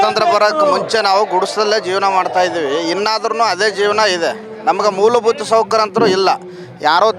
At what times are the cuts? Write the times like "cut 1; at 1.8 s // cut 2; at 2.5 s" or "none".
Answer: none